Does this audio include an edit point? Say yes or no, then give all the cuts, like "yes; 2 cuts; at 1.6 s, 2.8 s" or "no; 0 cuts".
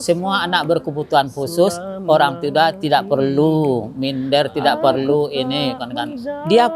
no; 0 cuts